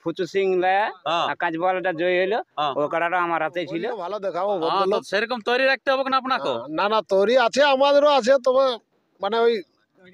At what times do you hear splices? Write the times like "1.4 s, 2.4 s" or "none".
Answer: 4.1 s

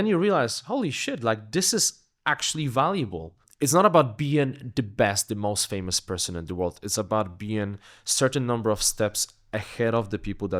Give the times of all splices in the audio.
3.4 s

